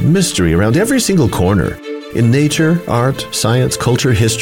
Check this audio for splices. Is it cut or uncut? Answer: uncut